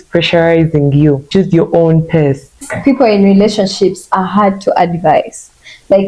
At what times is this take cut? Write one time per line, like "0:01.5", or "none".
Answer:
0:01.3
0:02.7